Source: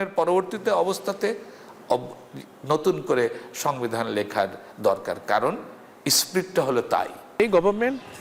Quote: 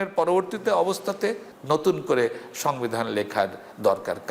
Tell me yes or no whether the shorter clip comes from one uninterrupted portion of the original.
no